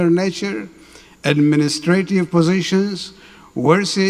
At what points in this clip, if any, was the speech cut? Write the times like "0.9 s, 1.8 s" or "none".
none